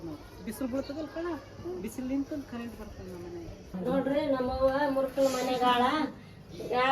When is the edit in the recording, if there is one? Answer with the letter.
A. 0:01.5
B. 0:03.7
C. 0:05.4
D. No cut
B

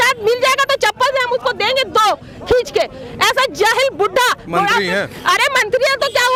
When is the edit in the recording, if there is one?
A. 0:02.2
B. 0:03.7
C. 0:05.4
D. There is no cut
D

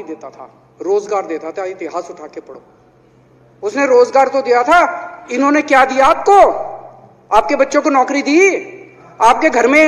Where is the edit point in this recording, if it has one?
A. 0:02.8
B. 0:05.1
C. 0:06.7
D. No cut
D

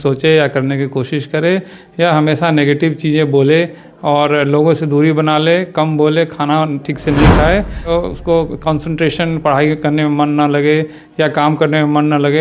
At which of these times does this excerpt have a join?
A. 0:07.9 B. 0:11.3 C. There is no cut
A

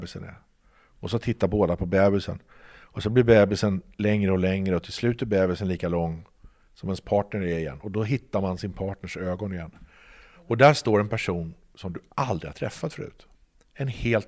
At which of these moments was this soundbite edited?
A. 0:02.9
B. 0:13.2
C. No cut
B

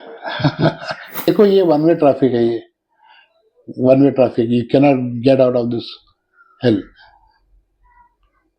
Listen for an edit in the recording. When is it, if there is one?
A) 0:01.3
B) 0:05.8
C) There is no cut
A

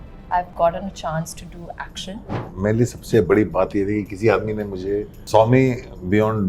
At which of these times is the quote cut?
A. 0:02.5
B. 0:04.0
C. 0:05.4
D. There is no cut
A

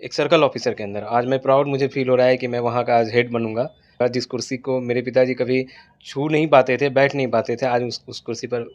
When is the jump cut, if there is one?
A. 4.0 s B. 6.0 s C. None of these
A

